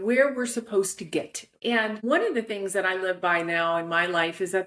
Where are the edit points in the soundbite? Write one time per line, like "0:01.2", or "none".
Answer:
0:01.8